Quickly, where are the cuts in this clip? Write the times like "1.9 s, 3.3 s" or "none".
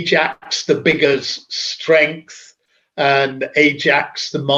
none